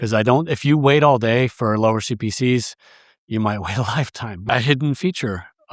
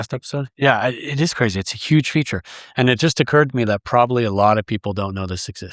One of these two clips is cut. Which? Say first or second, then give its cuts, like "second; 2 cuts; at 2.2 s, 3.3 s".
first; 1 cut; at 4.3 s